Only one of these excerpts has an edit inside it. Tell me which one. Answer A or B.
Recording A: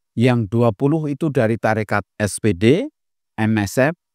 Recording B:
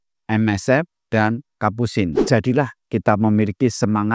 B